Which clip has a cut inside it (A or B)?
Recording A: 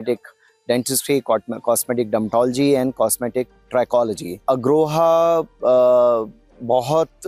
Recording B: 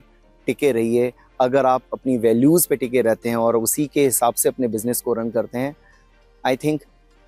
A